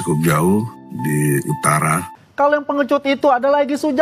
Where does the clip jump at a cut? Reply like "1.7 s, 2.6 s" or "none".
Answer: 2.3 s